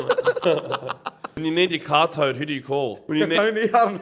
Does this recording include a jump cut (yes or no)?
yes